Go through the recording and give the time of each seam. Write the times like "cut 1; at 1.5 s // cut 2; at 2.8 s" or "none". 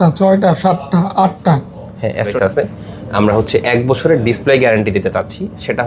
cut 1; at 2.3 s